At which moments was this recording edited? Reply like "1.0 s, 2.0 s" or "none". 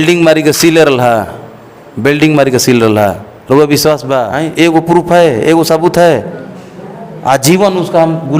4.4 s